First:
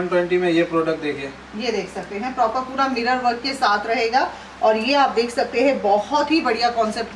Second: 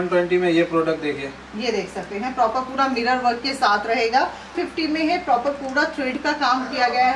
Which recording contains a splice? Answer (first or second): second